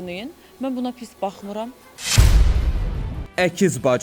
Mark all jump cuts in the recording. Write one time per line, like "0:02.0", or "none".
none